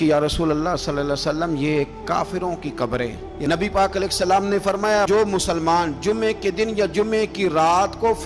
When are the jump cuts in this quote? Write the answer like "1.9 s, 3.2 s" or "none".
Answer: 3.3 s